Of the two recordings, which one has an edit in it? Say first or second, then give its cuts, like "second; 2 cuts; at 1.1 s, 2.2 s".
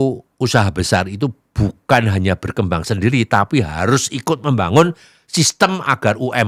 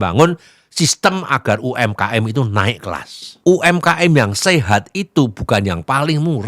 second; 1 cut; at 3.3 s